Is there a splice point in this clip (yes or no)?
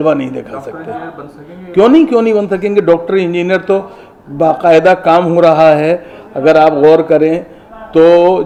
no